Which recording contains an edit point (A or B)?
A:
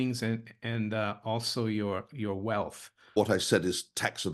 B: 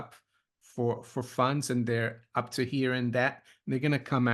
A